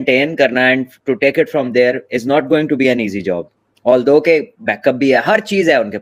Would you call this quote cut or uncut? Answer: uncut